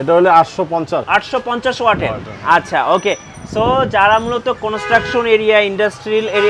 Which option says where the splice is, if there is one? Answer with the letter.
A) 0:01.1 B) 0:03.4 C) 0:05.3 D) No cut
A